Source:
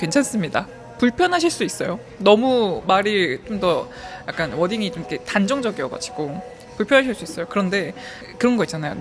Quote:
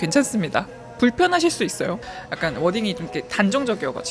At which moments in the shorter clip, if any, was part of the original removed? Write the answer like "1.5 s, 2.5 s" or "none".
2.0 s